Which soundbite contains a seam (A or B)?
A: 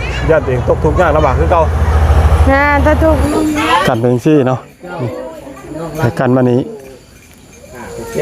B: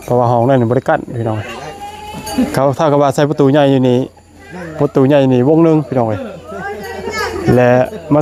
A